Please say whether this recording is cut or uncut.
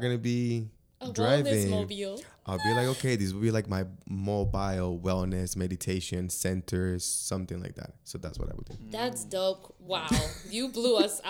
uncut